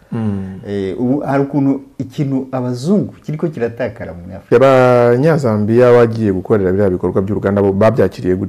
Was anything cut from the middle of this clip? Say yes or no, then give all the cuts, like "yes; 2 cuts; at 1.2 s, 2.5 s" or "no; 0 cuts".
yes; 1 cut; at 4.5 s